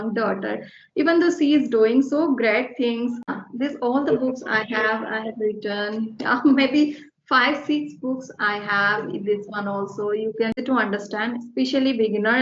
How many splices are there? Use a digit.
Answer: 2